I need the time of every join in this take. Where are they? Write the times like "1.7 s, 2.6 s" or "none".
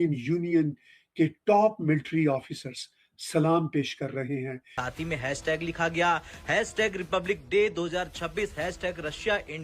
4.8 s